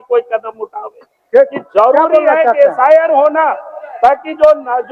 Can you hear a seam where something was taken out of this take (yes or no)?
no